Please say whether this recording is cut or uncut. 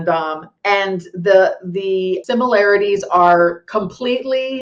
cut